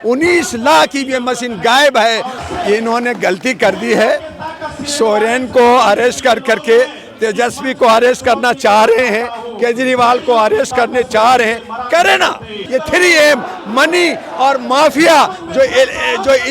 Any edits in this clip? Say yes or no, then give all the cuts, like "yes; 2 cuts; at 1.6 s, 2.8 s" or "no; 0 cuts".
yes; 2 cuts; at 2.3 s, 12.6 s